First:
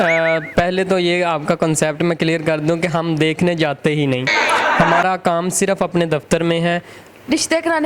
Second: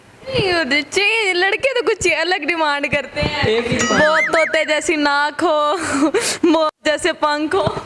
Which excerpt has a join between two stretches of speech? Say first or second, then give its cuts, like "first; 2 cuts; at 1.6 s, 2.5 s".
first; 1 cut; at 7.0 s